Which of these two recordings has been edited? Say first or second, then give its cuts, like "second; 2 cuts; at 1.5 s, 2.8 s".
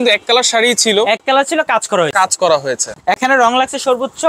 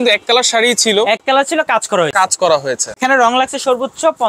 second; 1 cut; at 3.0 s